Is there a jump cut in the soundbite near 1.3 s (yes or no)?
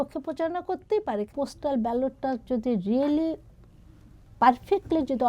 yes